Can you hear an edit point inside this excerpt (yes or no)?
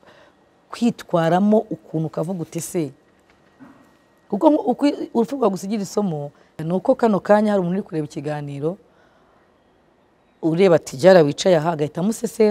yes